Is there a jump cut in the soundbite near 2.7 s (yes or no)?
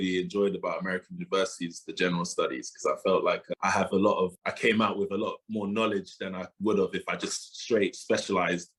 no